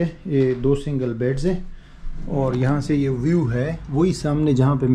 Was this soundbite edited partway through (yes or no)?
no